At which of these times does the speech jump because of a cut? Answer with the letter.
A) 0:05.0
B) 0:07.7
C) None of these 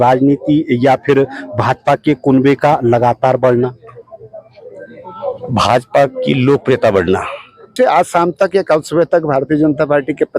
B